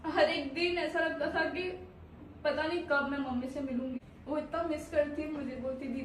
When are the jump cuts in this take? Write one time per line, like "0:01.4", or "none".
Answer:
0:04.0